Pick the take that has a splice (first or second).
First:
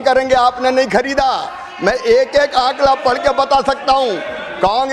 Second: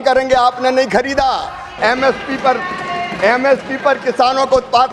second